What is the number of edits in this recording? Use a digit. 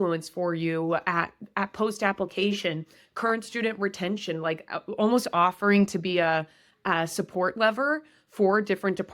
0